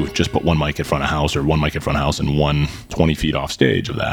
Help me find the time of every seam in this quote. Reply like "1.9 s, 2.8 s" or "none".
2.8 s